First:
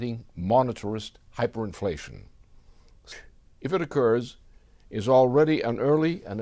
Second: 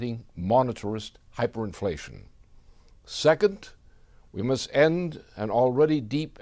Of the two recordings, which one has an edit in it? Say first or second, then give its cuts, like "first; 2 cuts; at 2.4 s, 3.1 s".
second; 1 cut; at 3.1 s